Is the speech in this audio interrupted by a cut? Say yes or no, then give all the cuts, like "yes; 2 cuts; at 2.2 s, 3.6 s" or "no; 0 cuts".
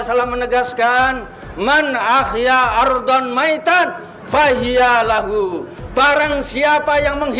no; 0 cuts